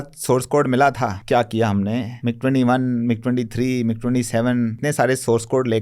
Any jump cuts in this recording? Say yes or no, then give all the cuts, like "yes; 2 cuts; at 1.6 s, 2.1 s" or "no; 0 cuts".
yes; 3 cuts; at 1.2 s, 2.1 s, 4.8 s